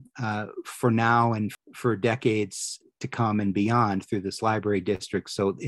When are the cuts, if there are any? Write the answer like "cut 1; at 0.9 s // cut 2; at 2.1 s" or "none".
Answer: cut 1; at 1.5 s